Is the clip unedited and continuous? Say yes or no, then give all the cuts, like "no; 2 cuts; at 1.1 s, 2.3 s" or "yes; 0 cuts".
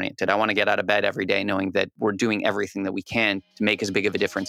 no; 2 cuts; at 1.9 s, 3.4 s